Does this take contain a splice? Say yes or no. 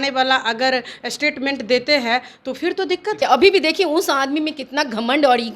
yes